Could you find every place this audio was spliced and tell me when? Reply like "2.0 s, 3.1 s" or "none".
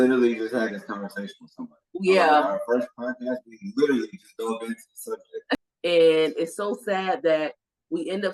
5.6 s